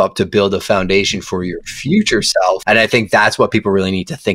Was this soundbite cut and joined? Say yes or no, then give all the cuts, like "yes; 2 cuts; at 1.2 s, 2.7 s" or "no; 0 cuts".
yes; 1 cut; at 2.6 s